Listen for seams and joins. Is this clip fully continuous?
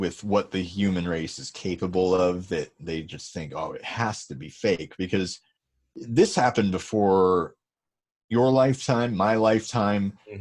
yes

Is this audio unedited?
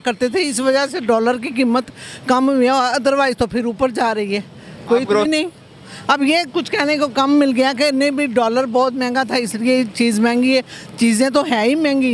no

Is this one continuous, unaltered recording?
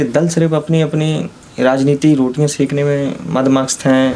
yes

